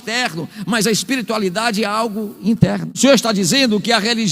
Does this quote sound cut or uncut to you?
cut